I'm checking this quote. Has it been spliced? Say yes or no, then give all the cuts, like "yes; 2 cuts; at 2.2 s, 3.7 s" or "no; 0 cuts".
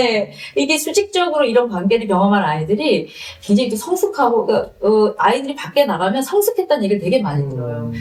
no; 0 cuts